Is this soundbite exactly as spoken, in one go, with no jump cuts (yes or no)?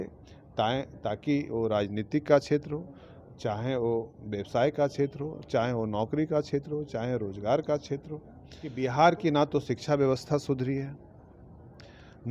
no